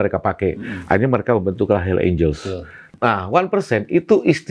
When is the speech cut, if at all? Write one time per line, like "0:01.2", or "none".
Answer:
0:02.9